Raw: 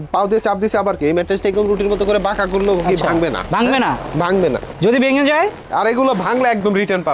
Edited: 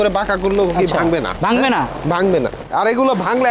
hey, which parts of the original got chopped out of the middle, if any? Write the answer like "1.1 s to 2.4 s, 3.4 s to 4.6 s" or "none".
4.7 s to 5.6 s